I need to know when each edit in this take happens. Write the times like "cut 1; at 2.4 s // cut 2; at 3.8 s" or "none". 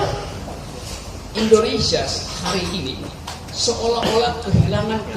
none